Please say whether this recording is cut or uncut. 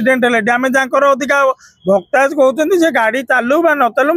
uncut